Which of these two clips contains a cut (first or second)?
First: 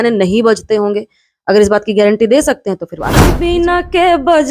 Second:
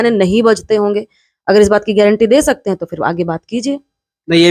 first